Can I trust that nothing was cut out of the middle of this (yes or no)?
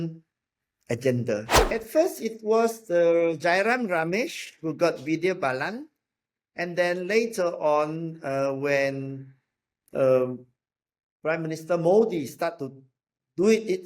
no